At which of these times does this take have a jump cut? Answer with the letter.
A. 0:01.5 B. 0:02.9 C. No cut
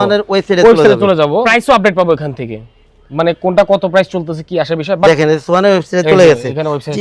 A